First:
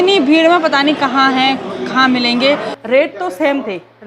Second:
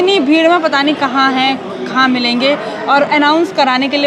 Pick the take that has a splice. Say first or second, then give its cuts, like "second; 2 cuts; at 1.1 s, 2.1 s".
first; 1 cut; at 2.7 s